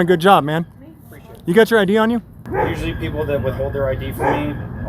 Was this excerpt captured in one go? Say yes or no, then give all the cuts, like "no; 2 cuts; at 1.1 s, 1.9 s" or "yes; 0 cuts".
no; 1 cut; at 2.4 s